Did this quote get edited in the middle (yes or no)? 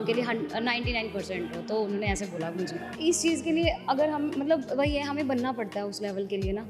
yes